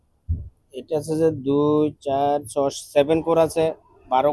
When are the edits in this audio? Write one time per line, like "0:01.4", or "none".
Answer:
none